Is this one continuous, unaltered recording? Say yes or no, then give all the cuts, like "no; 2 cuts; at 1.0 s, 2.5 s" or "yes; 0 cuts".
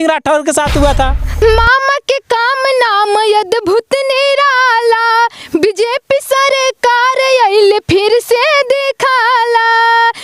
no; 1 cut; at 1.4 s